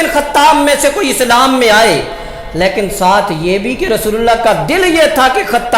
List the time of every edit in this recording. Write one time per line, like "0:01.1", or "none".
none

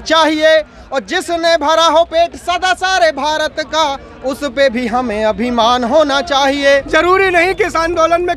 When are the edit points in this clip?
0:06.7

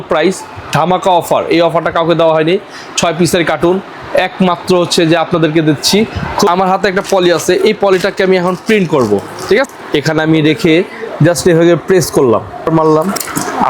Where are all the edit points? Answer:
0:06.5
0:09.6
0:12.7

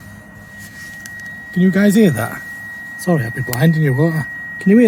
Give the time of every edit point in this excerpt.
none

